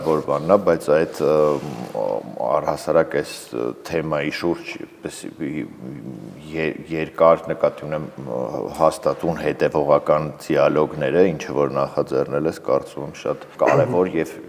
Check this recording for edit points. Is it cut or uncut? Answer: cut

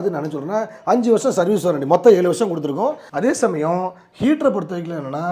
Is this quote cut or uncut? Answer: cut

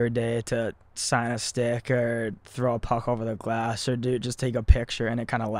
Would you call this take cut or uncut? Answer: uncut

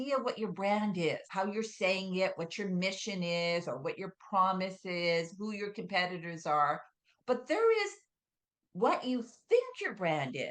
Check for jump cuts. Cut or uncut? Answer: cut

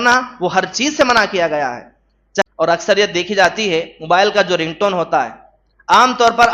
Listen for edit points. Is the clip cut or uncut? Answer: cut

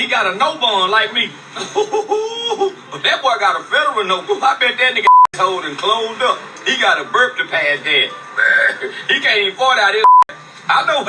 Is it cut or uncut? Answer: uncut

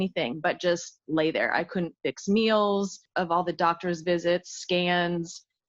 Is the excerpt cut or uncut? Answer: cut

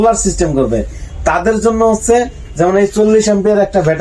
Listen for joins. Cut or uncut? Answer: uncut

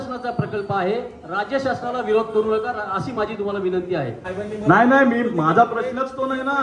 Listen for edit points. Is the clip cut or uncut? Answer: cut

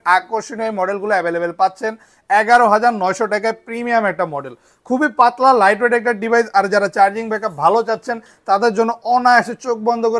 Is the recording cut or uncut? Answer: uncut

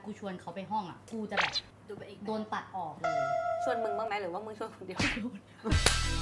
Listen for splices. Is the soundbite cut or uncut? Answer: cut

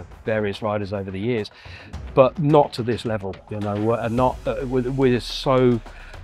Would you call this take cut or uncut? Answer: uncut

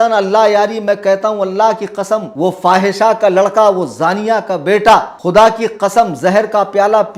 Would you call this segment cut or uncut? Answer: cut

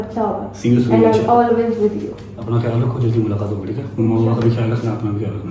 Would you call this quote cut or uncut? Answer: uncut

